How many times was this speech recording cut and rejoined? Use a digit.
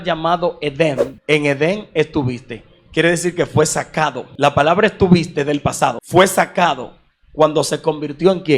3